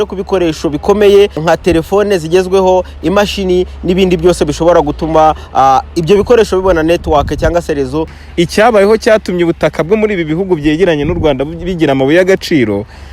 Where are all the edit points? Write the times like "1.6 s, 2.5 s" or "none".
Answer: 1.4 s, 8.2 s